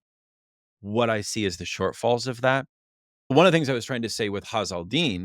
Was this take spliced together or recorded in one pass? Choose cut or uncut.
cut